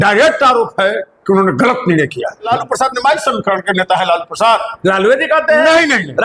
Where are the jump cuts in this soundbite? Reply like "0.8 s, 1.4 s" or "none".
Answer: 2.5 s